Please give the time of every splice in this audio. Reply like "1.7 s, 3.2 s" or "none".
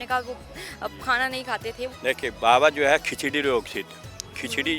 1.9 s